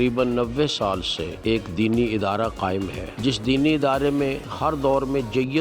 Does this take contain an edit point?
yes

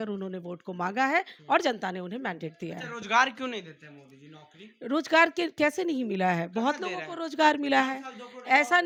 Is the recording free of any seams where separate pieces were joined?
yes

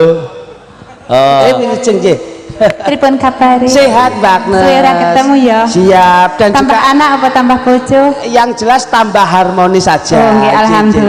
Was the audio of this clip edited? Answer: no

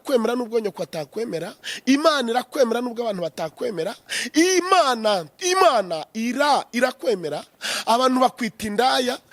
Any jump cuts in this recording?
no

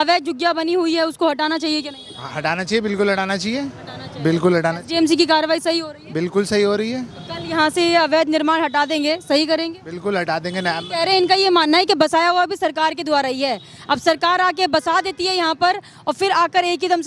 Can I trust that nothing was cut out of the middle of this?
yes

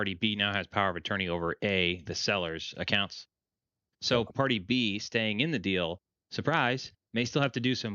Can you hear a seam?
yes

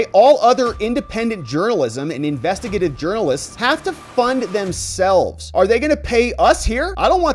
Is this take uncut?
yes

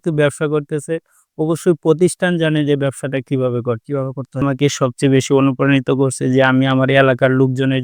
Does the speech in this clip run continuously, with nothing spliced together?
no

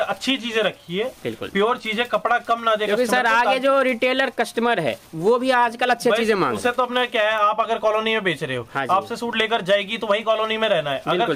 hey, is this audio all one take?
yes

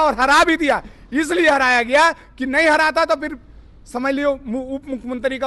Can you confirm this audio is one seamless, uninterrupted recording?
yes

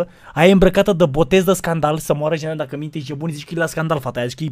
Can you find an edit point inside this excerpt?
no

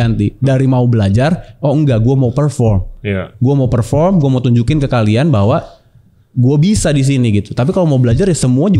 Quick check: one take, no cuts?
yes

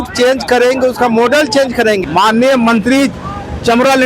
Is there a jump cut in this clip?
yes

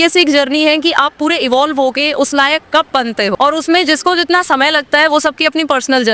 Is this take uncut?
no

